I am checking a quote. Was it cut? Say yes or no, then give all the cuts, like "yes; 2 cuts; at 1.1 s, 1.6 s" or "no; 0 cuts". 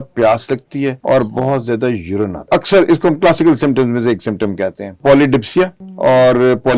yes; 4 cuts; at 1.0 s, 2.5 s, 5.0 s, 5.8 s